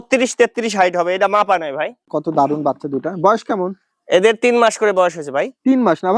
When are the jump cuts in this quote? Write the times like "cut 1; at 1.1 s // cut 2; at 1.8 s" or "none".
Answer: cut 1; at 2.1 s